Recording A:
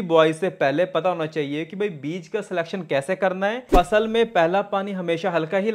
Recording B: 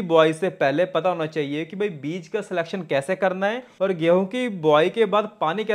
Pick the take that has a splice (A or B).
A